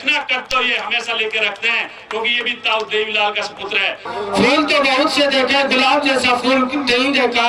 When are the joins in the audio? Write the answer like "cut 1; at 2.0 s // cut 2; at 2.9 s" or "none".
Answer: cut 1; at 4.0 s